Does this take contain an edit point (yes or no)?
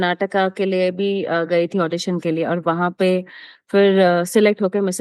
no